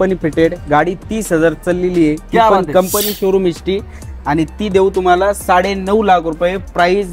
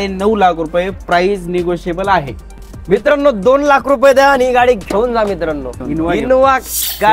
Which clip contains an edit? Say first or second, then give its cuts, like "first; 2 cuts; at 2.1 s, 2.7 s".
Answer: second; 2 cuts; at 3.0 s, 6.2 s